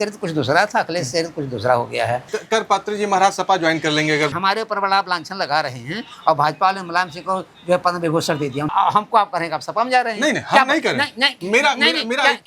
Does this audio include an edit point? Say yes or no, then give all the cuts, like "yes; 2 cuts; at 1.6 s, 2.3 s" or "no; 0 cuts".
yes; 3 cuts; at 2.2 s, 4.3 s, 8.7 s